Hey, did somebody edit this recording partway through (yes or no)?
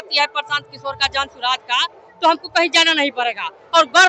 no